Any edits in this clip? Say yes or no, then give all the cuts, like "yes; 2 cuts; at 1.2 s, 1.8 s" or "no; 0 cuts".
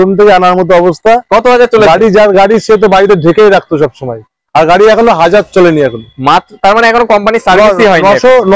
no; 0 cuts